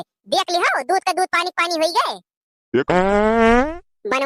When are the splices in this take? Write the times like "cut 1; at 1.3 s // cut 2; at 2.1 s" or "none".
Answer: cut 1; at 2.9 s

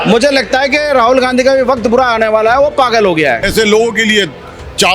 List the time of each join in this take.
cut 1; at 3.5 s

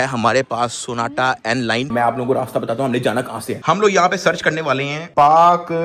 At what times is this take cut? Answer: cut 1; at 1.9 s

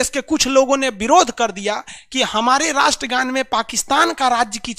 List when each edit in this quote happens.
none

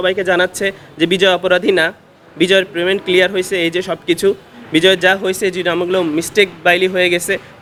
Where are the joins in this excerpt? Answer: none

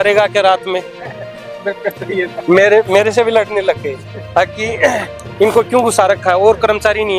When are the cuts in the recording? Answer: none

